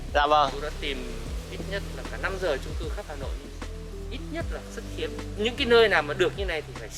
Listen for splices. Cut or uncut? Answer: uncut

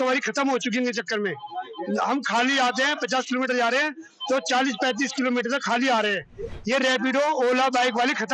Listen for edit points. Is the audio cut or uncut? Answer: uncut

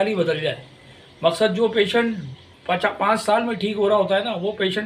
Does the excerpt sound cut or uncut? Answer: uncut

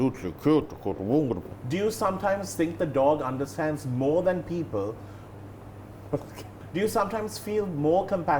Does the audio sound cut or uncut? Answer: cut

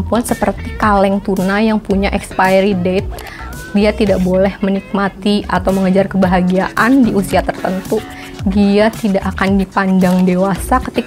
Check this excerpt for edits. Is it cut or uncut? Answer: uncut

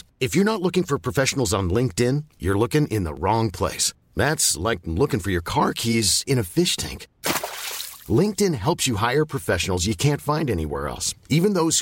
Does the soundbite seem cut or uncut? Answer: uncut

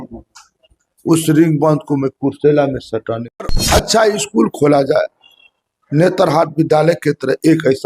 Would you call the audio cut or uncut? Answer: cut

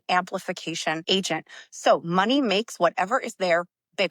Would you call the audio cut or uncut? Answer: cut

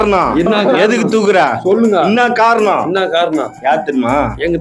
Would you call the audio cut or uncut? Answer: uncut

